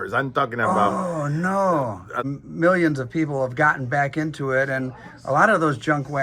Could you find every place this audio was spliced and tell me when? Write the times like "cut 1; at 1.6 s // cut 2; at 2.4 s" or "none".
cut 1; at 2.3 s